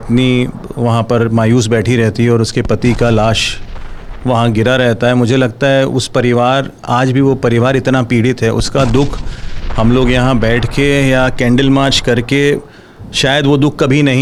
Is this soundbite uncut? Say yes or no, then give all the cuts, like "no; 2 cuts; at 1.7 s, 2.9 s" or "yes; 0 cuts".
yes; 0 cuts